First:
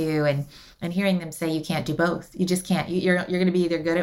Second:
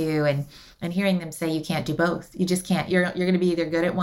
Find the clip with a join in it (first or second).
second